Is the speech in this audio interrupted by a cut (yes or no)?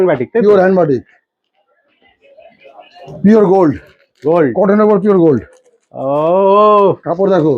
yes